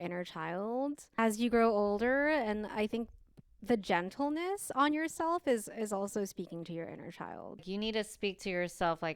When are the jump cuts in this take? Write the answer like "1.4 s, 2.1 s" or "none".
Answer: 1.2 s, 7.7 s